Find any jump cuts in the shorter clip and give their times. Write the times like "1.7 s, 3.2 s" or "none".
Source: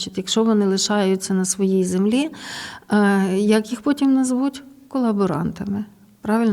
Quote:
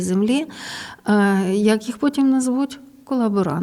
none